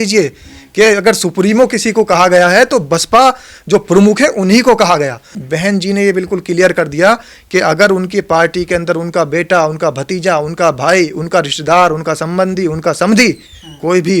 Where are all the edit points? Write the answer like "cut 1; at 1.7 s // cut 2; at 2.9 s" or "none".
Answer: cut 1; at 5.3 s